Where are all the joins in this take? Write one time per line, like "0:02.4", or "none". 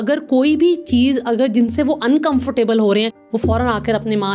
none

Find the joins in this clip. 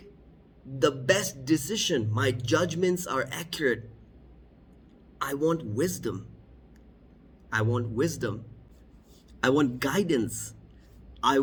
none

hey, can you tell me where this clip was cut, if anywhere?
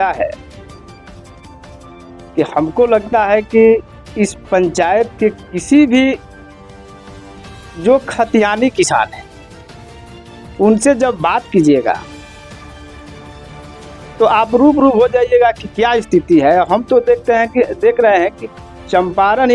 0:12.4
0:14.0

